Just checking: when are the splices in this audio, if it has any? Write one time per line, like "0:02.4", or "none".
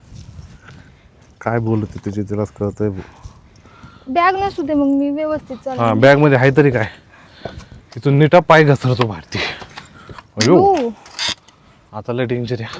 none